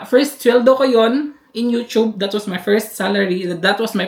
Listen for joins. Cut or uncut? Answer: uncut